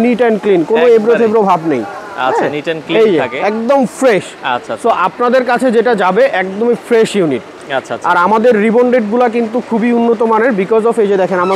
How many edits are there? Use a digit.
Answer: 0